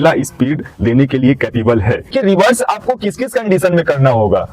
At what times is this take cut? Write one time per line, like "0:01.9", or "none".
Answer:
0:02.1